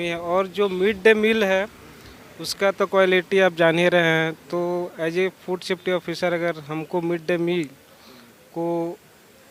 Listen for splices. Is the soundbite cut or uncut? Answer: uncut